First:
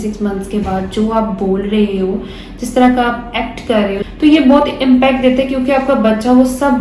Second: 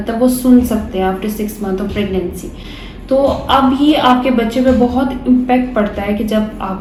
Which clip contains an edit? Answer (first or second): first